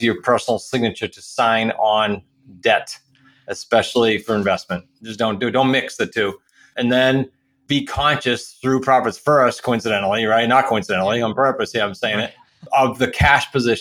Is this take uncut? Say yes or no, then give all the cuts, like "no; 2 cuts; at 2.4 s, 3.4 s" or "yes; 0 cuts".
no; 3 cuts; at 6.7 s, 7.6 s, 12.6 s